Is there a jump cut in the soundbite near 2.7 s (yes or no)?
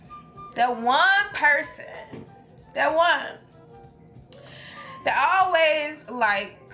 no